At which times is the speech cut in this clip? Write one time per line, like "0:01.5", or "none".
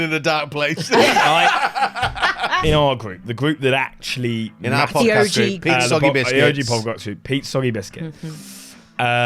0:02.5